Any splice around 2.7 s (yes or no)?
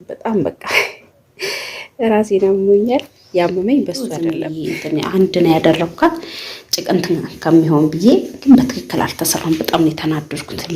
no